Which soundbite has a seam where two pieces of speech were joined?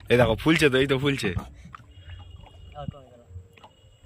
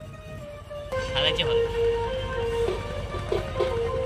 second; 1 cut; at 0.9 s

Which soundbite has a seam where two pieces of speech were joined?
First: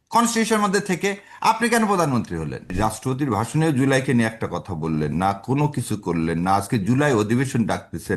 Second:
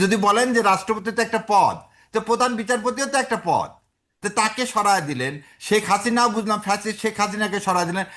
first; 1 cut; at 2.7 s

